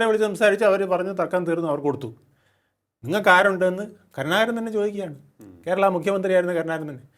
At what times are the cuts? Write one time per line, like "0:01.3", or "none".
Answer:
none

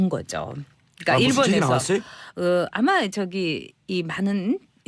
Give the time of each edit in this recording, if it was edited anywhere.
0:01.4

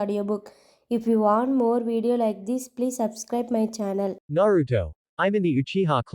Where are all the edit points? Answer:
0:04.2

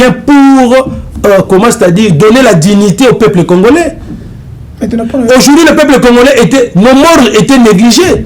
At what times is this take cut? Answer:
none

